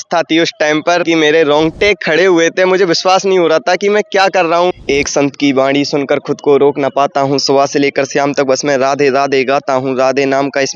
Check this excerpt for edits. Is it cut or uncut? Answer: cut